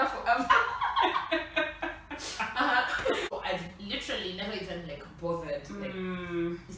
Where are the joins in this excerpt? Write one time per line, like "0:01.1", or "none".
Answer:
0:03.3